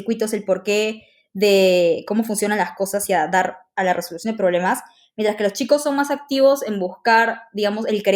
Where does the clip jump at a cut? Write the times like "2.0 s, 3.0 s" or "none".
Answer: none